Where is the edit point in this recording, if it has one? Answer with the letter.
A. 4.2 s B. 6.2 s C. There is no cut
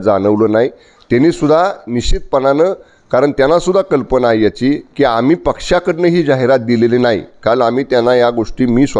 C